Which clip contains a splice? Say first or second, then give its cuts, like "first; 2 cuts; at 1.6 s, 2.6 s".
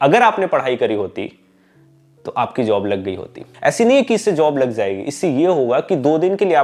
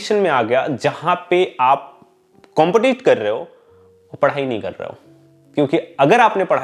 first; 1 cut; at 3.4 s